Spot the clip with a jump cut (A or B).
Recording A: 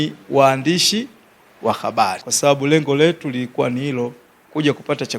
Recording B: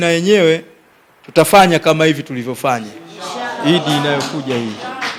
A